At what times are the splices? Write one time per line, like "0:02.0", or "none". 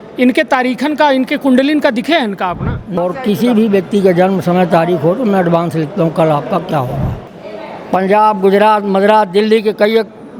0:03.0
0:07.3